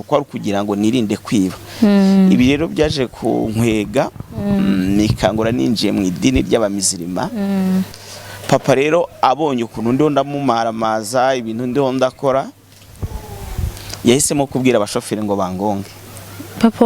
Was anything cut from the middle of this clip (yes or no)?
yes